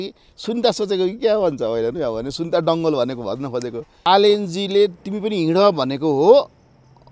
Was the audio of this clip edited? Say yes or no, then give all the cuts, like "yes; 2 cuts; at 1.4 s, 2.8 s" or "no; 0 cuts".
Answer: yes; 1 cut; at 4.1 s